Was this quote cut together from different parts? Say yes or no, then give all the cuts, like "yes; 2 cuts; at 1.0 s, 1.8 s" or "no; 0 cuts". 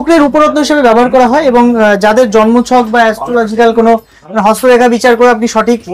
no; 0 cuts